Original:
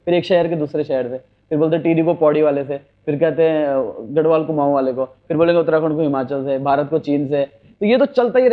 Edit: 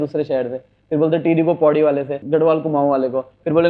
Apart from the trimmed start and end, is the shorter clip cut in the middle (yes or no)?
yes